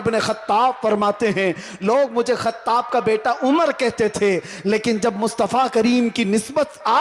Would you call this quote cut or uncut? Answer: uncut